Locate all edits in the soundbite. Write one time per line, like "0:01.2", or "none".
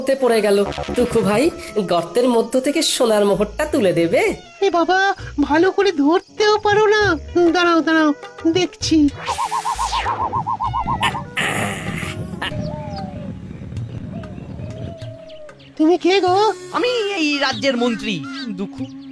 0:12.5

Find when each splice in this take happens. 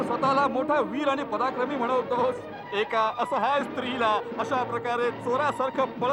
none

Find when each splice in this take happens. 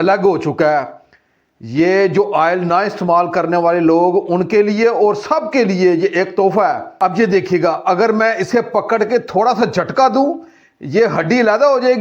0:06.9

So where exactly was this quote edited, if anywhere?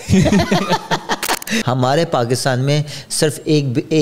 0:01.6

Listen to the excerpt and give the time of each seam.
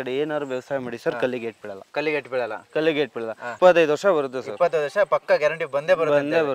0:03.5

